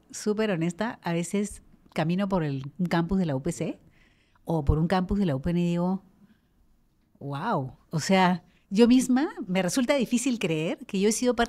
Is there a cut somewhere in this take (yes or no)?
no